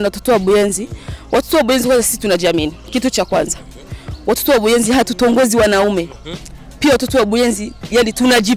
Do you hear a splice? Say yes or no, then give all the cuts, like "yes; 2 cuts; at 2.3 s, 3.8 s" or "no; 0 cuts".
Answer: no; 0 cuts